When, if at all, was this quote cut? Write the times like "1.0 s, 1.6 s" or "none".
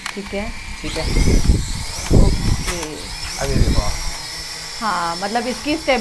none